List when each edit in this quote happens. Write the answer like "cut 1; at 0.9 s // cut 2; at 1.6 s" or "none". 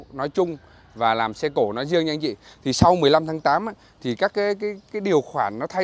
none